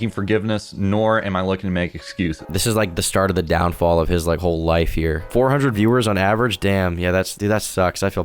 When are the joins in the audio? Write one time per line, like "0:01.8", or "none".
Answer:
0:02.4
0:05.3
0:07.3